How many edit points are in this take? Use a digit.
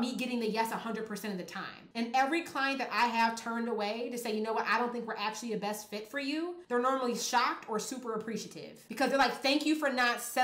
1